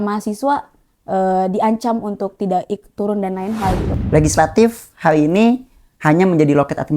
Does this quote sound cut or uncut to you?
cut